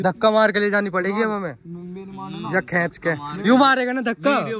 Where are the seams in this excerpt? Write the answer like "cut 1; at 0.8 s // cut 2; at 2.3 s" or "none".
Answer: none

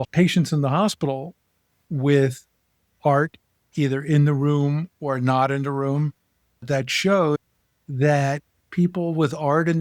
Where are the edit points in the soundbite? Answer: cut 1; at 6.5 s

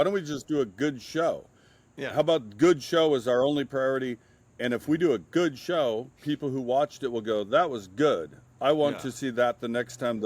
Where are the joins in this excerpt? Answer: none

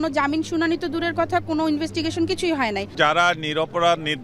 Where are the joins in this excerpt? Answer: cut 1; at 2.9 s

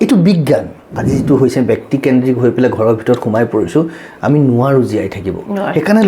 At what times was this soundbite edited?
cut 1; at 0.9 s

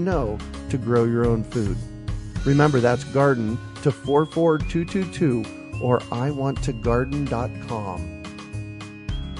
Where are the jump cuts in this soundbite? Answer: cut 1; at 8.0 s

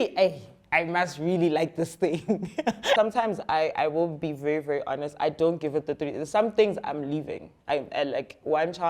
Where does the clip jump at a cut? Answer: cut 1; at 3.0 s

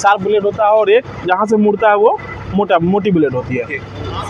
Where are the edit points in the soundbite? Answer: none

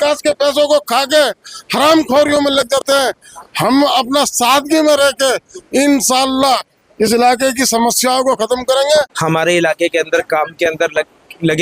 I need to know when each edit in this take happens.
cut 1; at 9.1 s

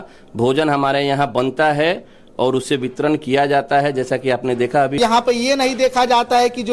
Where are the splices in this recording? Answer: cut 1; at 5.0 s

